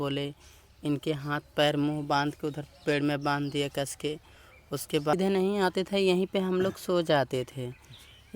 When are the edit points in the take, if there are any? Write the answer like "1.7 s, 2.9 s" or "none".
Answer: 5.1 s

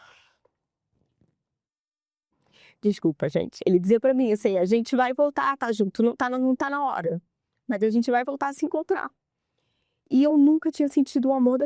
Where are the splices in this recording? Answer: none

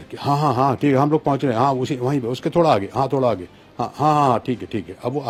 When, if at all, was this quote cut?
none

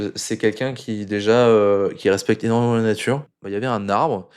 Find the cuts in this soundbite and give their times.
3.3 s

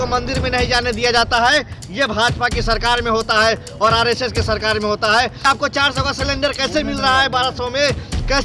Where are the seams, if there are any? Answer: 5.4 s

